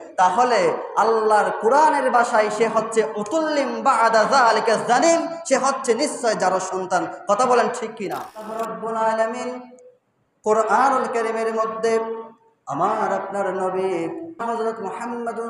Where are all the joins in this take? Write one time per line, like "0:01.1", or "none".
0:08.5
0:14.4